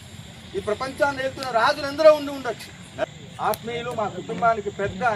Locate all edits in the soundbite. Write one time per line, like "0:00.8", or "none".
0:03.1